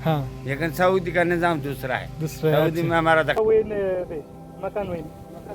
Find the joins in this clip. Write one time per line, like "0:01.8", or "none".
0:03.4